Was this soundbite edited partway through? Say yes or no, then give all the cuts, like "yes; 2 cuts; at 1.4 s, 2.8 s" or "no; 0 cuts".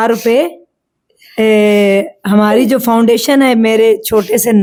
no; 0 cuts